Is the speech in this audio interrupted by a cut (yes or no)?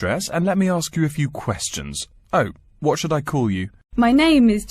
yes